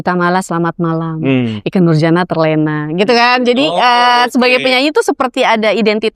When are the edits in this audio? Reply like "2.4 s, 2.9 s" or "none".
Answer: none